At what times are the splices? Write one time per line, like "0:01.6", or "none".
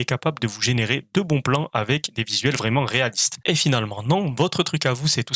none